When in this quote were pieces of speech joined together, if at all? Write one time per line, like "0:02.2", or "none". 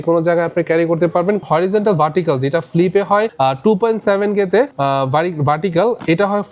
0:01.5
0:03.3
0:04.7